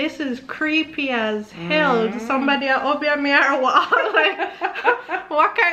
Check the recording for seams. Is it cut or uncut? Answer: uncut